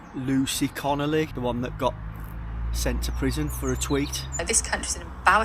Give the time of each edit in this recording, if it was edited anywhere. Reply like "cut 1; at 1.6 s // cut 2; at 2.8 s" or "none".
cut 1; at 1.3 s // cut 2; at 4.4 s